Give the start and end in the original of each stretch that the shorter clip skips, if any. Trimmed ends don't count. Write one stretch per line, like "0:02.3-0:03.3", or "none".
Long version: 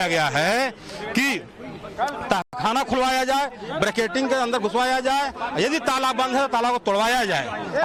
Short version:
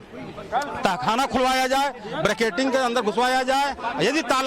0:02.5-0:02.6